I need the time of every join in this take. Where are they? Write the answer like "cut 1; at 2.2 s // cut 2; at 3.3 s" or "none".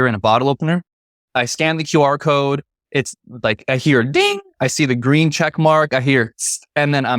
cut 1; at 1.2 s